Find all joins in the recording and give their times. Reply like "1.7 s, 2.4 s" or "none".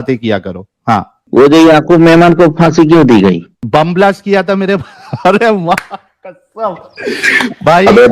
1.2 s